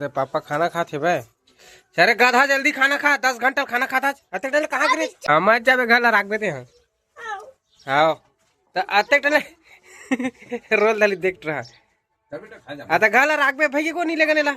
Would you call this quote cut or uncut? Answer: cut